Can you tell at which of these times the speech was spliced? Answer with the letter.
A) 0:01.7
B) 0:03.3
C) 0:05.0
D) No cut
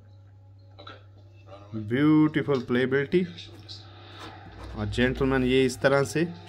D